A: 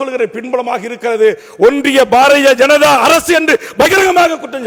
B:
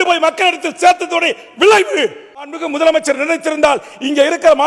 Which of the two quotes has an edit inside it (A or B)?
B